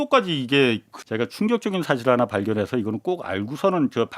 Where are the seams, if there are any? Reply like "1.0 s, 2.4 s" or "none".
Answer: 0.9 s